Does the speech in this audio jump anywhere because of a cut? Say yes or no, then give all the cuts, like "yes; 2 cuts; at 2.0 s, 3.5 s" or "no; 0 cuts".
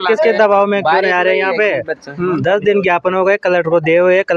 no; 0 cuts